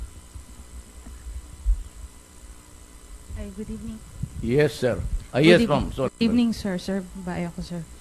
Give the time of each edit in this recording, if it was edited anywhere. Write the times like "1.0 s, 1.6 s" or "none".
none